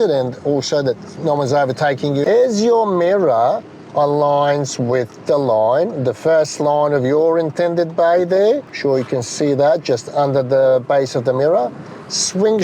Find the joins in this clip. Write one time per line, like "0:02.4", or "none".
0:02.2
0:08.7